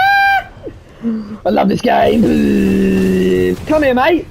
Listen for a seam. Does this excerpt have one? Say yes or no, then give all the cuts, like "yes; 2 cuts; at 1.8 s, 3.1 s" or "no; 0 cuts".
no; 0 cuts